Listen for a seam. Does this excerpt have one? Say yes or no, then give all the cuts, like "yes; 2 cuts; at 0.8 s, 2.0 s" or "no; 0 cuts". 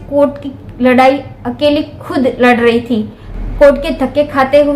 yes; 1 cut; at 3.2 s